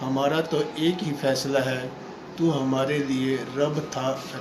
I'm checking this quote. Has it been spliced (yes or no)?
no